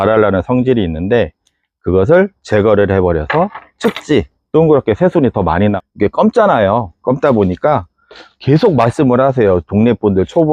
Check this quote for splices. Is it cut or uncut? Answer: cut